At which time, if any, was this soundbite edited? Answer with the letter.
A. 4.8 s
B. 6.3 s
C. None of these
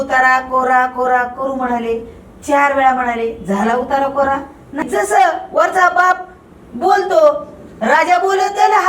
A